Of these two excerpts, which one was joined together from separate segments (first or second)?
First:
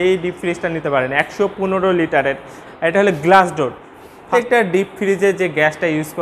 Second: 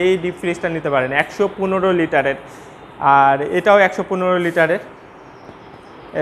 first